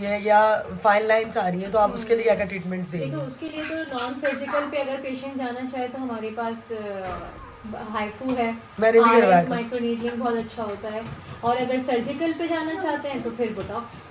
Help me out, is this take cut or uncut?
uncut